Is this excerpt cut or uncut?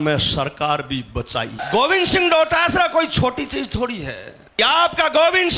cut